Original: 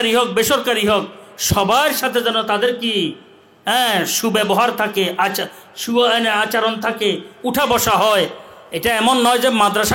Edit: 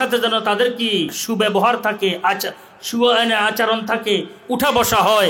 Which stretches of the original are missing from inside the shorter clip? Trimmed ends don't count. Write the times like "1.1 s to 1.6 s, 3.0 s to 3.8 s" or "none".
3.2 s to 4.1 s